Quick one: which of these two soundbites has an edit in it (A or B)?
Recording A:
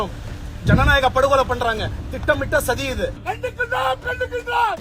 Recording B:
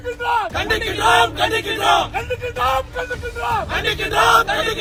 A